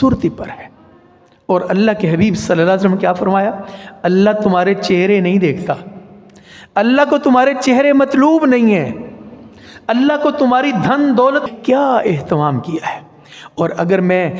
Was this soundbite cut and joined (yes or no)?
yes